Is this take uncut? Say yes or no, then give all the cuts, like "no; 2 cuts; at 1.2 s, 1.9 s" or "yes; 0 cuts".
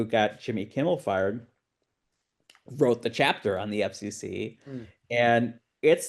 yes; 0 cuts